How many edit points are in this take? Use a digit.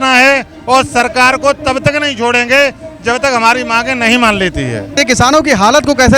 1